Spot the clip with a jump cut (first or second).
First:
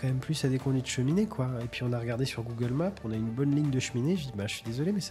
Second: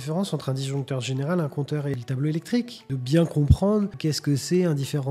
second